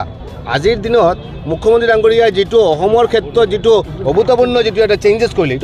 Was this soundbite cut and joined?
no; 0 cuts

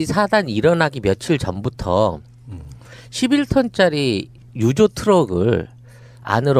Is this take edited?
no; 0 cuts

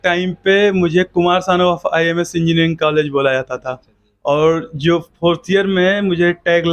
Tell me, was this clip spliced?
no; 0 cuts

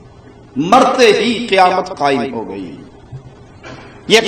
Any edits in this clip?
no; 0 cuts

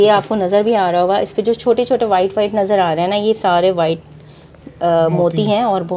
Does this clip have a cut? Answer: no; 0 cuts

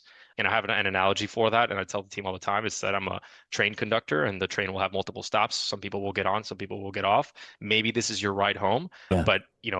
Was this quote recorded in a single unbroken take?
yes; 0 cuts

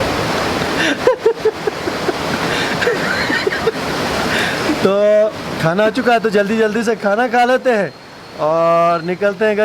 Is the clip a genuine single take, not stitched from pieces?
yes; 0 cuts

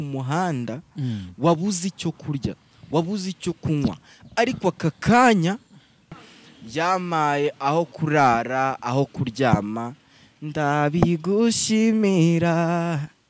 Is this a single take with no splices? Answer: no; 1 cut; at 6.2 s

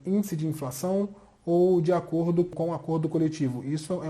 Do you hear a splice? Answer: yes; 1 cut; at 2.5 s

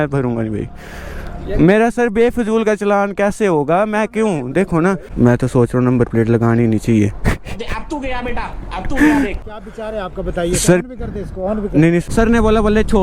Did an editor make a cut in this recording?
yes; 3 cuts; at 5.1 s, 9.5 s, 12.0 s

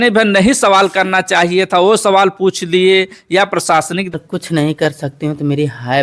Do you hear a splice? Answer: yes; 1 cut; at 4.1 s

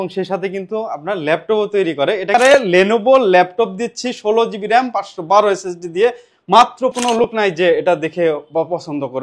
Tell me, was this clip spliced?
yes; 2 cuts; at 2.3 s, 7.0 s

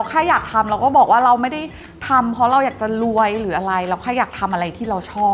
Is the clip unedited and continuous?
yes; 0 cuts

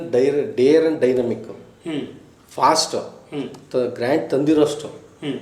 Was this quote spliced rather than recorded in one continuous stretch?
no; 0 cuts

